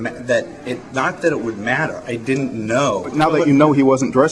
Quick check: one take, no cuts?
yes; 0 cuts

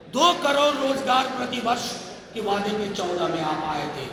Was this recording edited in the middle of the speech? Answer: no; 0 cuts

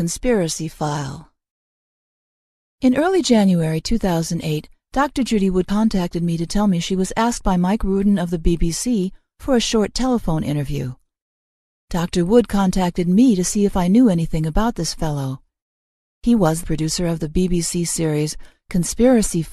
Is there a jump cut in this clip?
no; 0 cuts

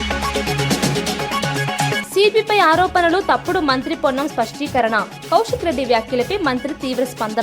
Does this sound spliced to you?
no; 0 cuts

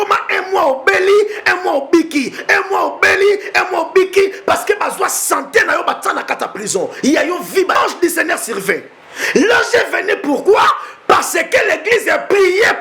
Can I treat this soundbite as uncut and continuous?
no; 1 cut; at 7.8 s

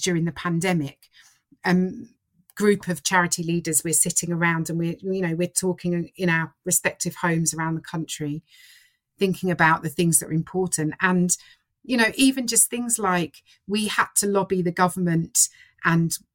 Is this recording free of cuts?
yes; 0 cuts

